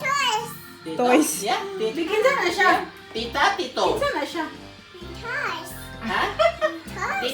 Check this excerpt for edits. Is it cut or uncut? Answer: uncut